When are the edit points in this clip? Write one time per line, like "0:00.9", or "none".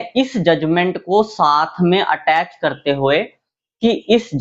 none